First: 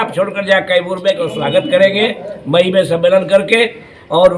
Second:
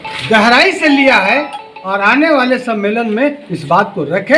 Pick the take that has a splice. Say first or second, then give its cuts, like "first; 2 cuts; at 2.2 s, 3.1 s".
first; 1 cut; at 1.3 s